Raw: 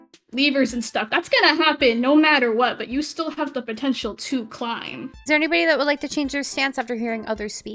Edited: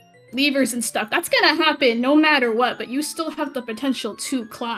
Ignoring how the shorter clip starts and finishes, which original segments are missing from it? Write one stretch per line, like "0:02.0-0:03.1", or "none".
none